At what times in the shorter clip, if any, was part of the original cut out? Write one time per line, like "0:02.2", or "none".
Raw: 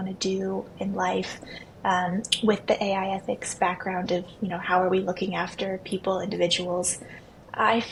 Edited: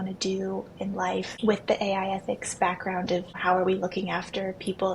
0:01.3
0:03.3